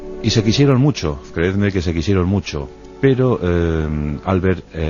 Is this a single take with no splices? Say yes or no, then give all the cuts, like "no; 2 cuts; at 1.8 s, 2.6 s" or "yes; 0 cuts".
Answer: no; 1 cut; at 1.6 s